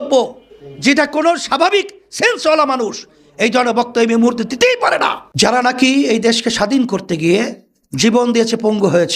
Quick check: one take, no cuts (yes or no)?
no